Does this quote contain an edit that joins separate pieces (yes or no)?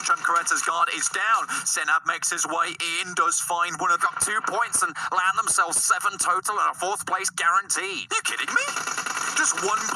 yes